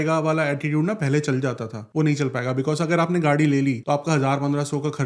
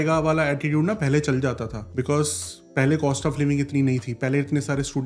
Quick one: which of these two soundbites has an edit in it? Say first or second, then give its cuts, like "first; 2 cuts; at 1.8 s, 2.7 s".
first; 1 cut; at 1.8 s